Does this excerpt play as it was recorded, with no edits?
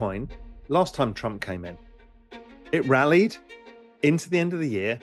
yes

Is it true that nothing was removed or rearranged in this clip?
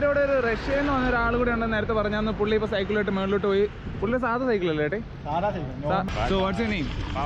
no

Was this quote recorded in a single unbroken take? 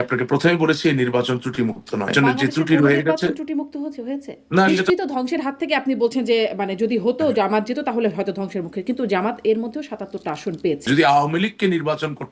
no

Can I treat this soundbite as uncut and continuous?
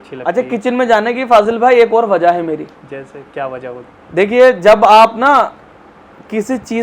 yes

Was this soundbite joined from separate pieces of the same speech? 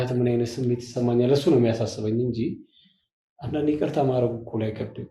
no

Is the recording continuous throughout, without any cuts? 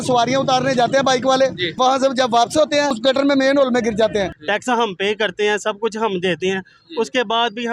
no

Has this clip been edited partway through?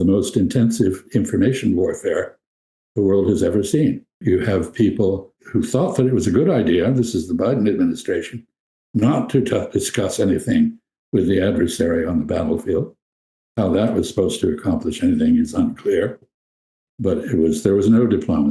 yes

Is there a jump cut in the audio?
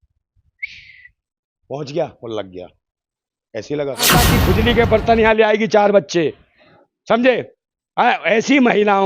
yes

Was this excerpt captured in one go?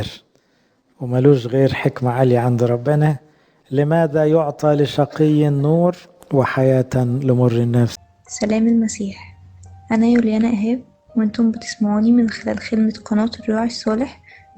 no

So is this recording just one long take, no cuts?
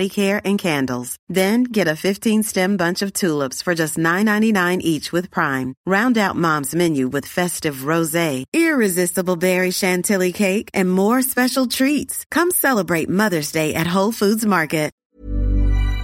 no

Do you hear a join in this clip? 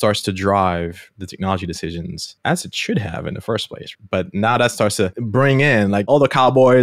yes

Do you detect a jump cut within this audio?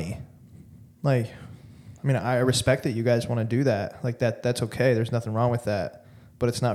no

